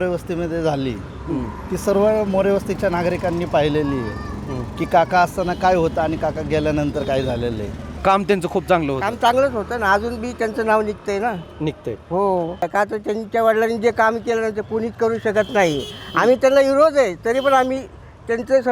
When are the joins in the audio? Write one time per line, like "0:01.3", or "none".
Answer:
0:07.9
0:12.7